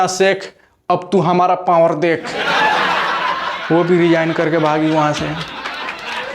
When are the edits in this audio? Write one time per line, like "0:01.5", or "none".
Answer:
0:02.4
0:03.7
0:05.4